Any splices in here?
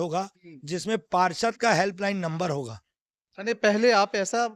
no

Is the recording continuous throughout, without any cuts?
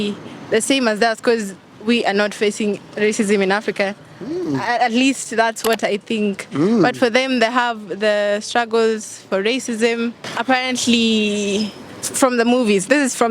yes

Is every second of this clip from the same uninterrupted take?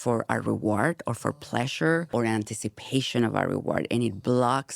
no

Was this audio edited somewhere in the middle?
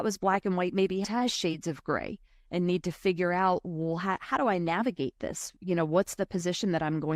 yes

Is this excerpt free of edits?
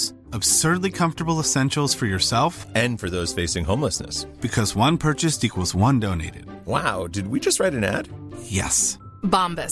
yes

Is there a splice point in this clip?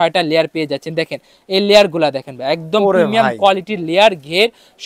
no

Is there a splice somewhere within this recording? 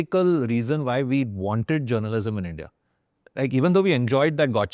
no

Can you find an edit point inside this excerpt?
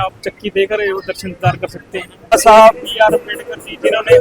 yes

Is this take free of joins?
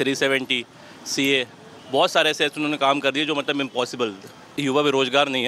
no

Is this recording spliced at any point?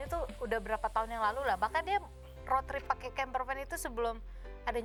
no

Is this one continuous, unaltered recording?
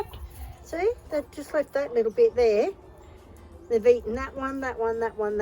yes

